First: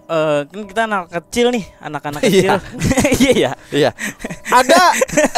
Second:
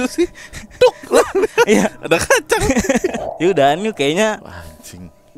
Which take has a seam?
second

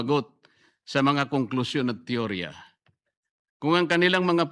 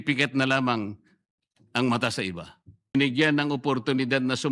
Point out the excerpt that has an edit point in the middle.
second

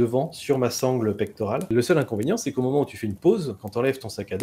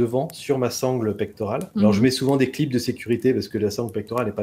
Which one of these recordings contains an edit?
first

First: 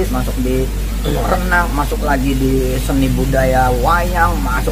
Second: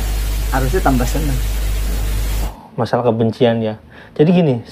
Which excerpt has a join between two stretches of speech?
second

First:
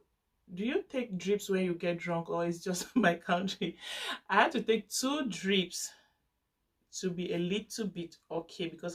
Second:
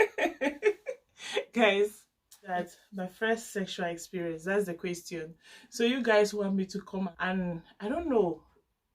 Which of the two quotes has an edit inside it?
second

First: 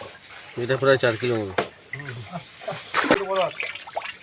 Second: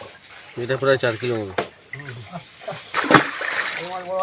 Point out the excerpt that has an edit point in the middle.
first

